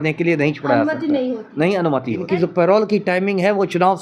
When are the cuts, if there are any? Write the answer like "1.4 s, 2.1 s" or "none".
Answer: 2.2 s